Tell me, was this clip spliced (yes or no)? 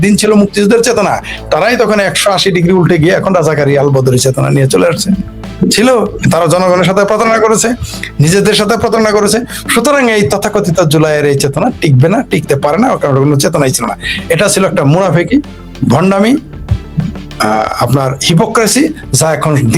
no